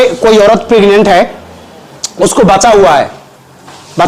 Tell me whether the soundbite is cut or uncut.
uncut